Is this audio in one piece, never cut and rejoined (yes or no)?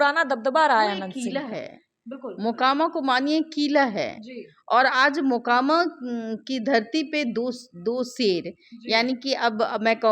yes